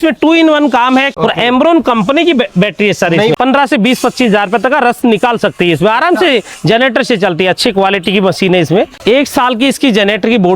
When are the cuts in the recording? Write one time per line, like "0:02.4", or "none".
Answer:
0:01.1
0:03.3
0:09.0